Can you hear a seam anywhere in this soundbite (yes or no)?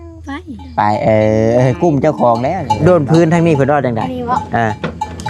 yes